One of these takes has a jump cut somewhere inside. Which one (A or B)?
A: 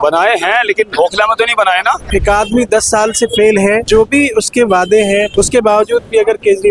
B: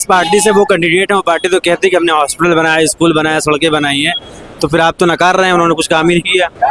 A